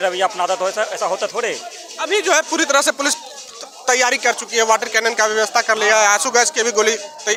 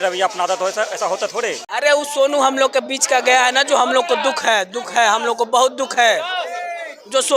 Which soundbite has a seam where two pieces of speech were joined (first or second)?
second